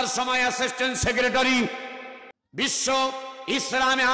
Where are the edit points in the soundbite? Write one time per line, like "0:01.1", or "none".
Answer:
none